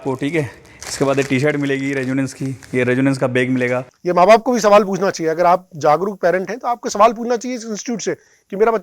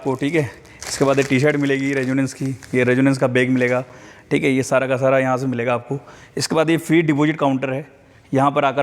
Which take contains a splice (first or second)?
first